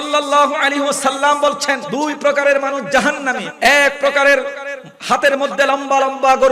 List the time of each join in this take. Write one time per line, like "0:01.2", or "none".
0:01.8
0:03.4